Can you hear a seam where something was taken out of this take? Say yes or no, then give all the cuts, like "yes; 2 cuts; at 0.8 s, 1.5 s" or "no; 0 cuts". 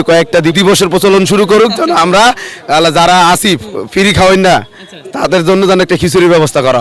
no; 0 cuts